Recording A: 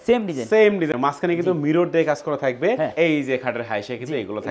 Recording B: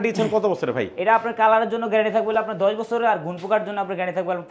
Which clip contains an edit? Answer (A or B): A